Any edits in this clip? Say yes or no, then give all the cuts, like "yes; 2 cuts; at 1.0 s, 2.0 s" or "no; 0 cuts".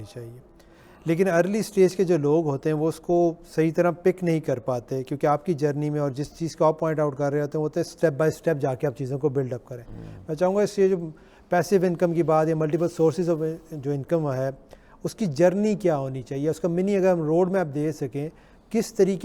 no; 0 cuts